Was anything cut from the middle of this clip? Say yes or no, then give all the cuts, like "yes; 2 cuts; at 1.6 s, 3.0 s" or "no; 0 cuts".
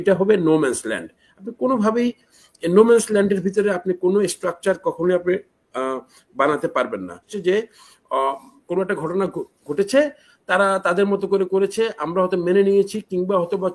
yes; 1 cut; at 7.3 s